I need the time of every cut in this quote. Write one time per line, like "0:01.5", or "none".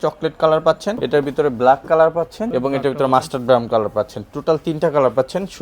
0:01.0
0:02.4